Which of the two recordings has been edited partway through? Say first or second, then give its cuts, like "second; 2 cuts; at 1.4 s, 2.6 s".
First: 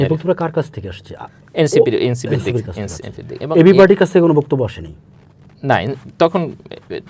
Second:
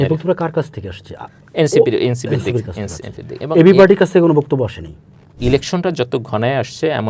second; 1 cut; at 5.4 s